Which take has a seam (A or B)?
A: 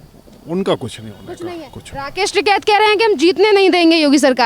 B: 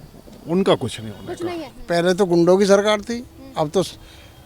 B